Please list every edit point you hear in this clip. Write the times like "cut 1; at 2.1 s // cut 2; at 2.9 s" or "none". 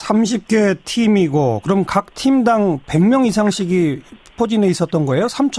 cut 1; at 3.5 s